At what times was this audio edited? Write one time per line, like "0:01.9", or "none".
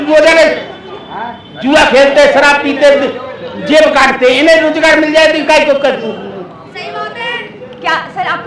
none